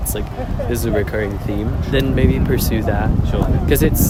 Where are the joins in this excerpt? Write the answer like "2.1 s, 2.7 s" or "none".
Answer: none

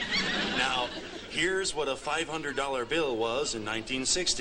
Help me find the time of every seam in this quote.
none

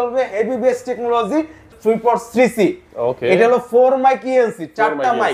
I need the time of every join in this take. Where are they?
1.7 s

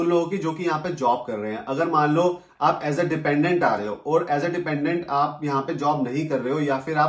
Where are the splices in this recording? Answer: none

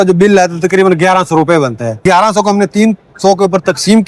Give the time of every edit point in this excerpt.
1.9 s

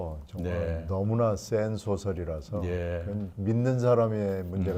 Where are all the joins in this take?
none

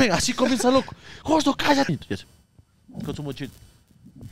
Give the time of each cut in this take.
1.9 s

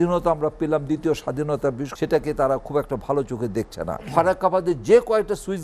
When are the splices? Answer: 1.9 s, 4.1 s

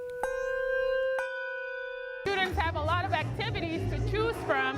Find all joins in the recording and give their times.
2.2 s

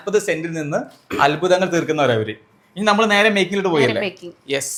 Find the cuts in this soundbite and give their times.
none

